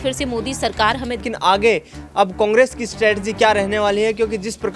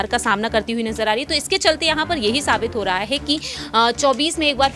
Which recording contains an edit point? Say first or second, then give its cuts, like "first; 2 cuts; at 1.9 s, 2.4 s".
first; 1 cut; at 1.2 s